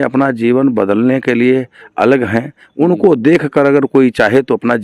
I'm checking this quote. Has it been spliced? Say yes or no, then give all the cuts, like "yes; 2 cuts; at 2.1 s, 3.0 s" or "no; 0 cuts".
no; 0 cuts